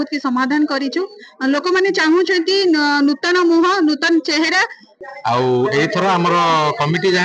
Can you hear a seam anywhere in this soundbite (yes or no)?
yes